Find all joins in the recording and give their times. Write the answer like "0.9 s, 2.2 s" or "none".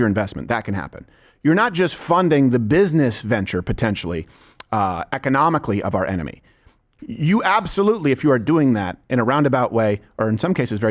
none